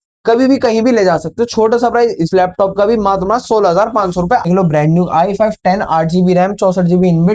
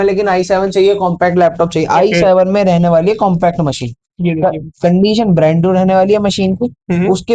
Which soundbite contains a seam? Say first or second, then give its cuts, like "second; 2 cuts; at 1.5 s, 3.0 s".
first; 1 cut; at 4.5 s